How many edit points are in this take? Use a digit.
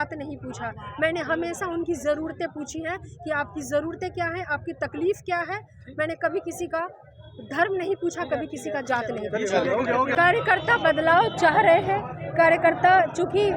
1